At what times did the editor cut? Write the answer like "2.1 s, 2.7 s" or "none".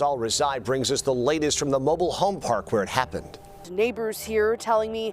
3.6 s